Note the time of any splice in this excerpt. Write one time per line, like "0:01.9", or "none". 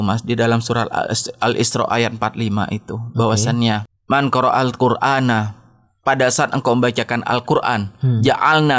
0:03.9

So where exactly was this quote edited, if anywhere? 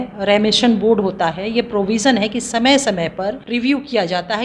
0:03.4

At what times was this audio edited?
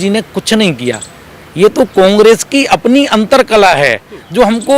none

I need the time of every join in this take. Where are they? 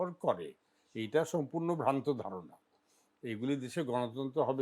none

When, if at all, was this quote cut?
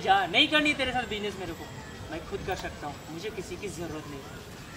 none

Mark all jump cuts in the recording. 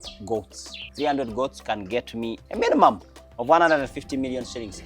0:00.8
0:02.4

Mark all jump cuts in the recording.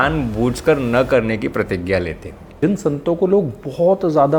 0:02.6

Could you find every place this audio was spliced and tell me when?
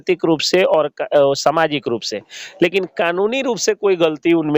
none

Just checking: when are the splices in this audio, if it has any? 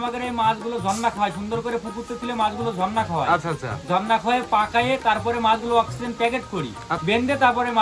0:06.9

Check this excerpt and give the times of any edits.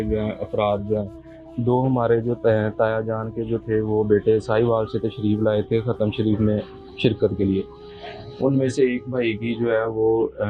none

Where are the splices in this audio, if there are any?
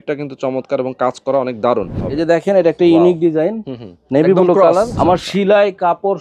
0:02.0
0:04.9

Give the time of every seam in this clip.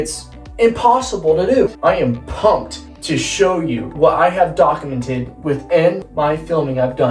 0:01.7
0:03.9
0:06.1

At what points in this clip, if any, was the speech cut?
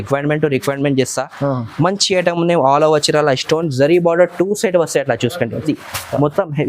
0:05.7

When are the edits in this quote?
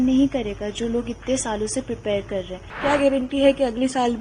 0:02.7

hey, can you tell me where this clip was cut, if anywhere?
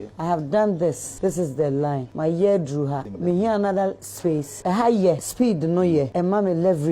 0:01.1
0:02.1
0:03.1
0:04.5
0:05.3
0:06.1

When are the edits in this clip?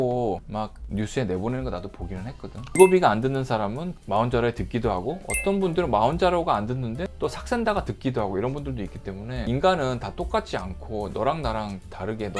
0:02.8
0:09.5

